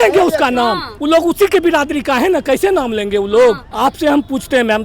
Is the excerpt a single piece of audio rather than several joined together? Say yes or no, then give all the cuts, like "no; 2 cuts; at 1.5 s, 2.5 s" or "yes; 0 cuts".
no; 2 cuts; at 0.9 s, 3.7 s